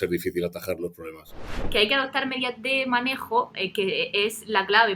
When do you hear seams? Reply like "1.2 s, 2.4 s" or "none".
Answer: 1.6 s